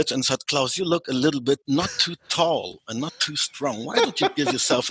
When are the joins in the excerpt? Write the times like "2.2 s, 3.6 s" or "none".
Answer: 1.6 s